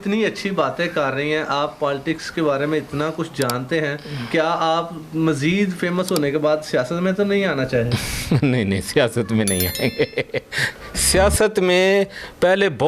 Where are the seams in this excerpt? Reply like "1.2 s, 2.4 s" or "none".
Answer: none

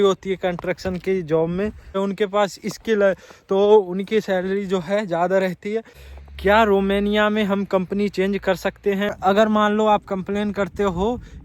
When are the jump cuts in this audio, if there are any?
2.0 s, 6.0 s, 9.1 s

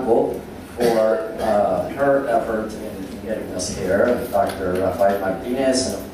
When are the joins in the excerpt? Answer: 2.7 s

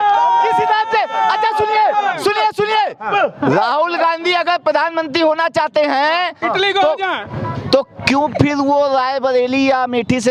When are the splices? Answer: none

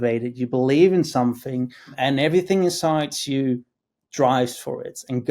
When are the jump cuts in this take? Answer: 1.9 s

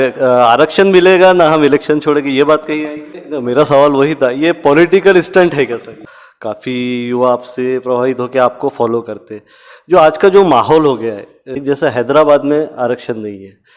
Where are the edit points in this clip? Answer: 3.1 s, 5.9 s, 11.6 s

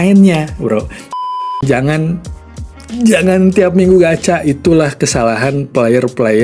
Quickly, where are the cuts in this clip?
1.1 s

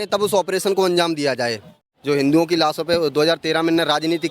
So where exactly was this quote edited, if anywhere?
1.8 s

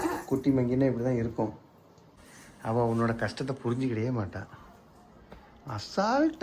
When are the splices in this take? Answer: 2.0 s

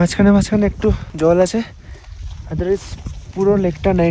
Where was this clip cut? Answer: 1.1 s

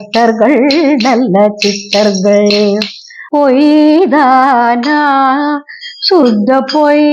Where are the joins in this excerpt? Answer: 3.2 s

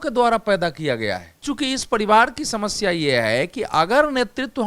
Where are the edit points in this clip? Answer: 1.4 s

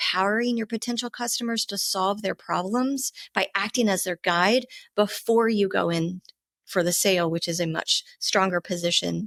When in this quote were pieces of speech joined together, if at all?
none

